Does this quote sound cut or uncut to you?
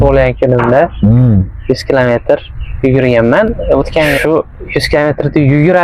cut